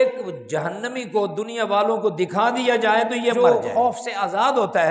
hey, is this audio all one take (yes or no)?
no